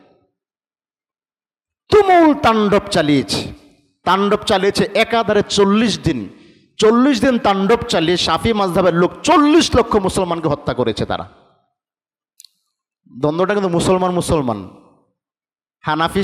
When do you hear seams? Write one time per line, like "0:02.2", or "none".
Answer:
none

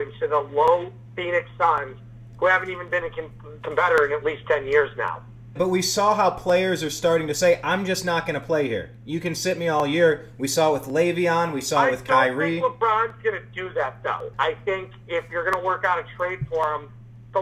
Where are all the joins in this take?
0:05.5
0:14.3

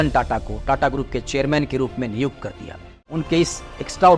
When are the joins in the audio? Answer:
0:02.9

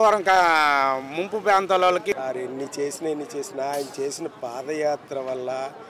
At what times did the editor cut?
0:02.1

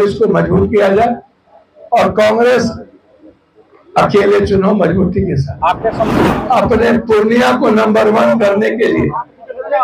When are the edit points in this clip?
0:06.1

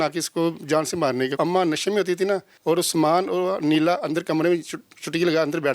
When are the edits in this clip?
0:01.3
0:02.5

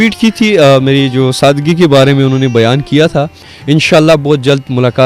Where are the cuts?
0:03.5

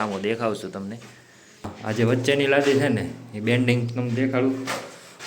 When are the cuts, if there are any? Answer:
0:01.7

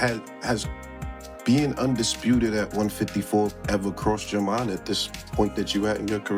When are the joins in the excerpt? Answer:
none

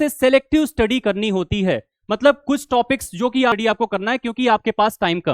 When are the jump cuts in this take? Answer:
0:03.5

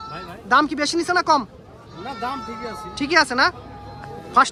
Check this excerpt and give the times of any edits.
none

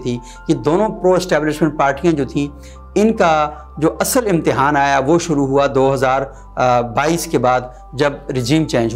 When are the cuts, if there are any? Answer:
none

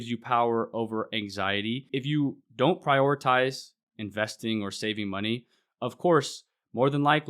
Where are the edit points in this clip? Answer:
0:01.9

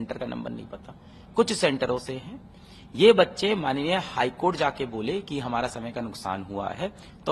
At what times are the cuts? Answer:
none

